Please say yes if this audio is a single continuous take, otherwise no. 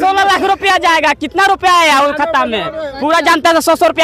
yes